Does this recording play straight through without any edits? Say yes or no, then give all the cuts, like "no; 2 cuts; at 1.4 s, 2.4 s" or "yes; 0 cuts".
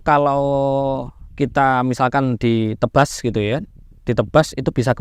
yes; 0 cuts